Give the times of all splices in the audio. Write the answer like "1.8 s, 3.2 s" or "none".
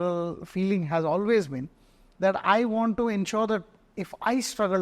none